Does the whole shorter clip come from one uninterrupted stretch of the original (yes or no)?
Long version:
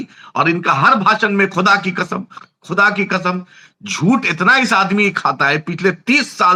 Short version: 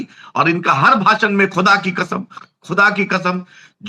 yes